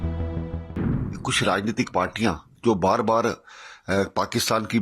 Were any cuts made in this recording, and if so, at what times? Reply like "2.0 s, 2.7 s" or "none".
0.9 s

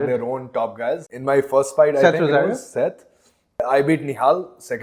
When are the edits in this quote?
1.1 s, 3.6 s

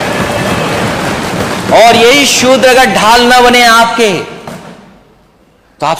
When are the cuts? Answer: none

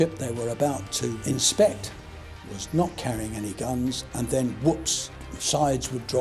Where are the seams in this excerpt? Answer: none

